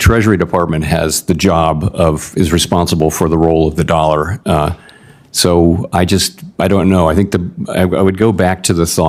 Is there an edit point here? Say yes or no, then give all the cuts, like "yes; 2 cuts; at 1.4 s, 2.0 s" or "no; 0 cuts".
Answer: no; 0 cuts